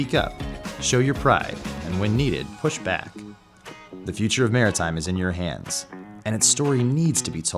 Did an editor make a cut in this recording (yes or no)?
yes